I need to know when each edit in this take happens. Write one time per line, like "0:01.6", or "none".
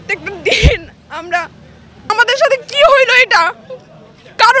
0:02.1

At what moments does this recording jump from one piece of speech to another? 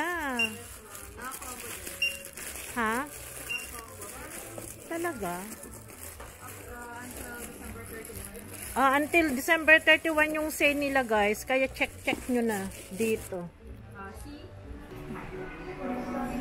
0:14.9

